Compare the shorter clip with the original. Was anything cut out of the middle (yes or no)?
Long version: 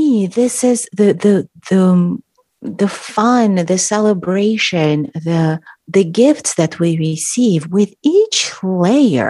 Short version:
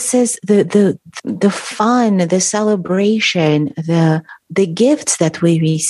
yes